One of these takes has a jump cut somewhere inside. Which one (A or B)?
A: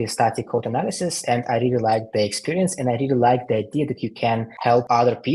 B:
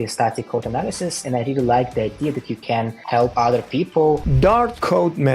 B